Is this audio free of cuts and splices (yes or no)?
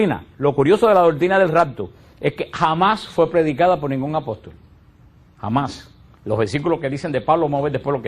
no